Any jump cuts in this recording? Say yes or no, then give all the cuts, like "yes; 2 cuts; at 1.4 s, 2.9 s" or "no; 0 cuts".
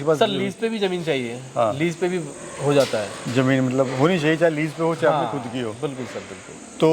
no; 0 cuts